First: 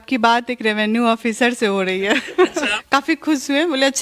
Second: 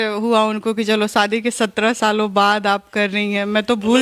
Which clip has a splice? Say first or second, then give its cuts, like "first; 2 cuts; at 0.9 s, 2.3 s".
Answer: first; 1 cut; at 2.7 s